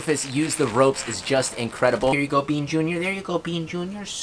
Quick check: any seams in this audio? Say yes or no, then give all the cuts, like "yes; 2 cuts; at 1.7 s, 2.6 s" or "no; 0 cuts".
yes; 1 cut; at 2.1 s